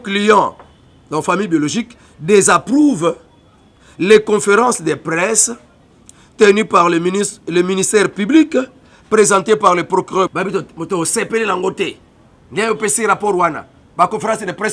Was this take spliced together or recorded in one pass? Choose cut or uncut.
cut